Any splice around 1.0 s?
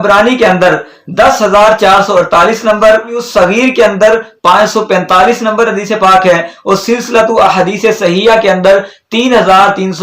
no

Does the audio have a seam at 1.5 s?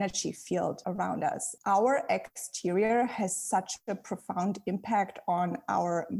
yes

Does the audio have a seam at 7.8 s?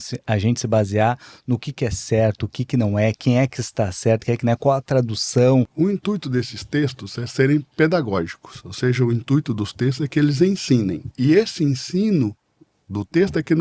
no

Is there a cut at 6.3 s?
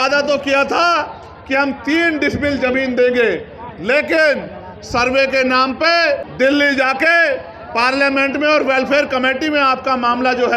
yes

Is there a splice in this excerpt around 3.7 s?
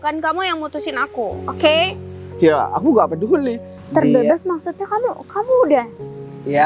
yes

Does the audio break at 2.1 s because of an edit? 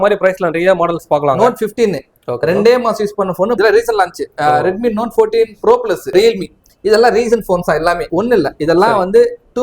no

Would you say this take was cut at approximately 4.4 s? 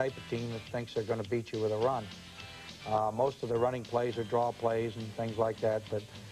yes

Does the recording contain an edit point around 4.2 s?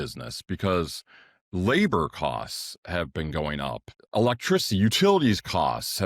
yes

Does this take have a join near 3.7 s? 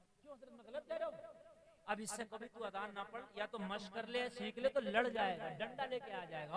no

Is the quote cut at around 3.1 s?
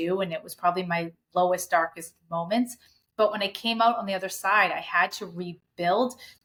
no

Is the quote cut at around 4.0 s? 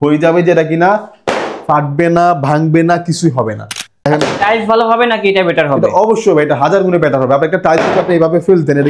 yes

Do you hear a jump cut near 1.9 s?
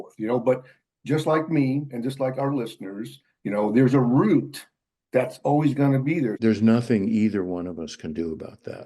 no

